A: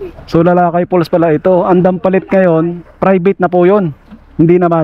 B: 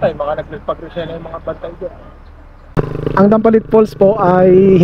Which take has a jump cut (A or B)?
B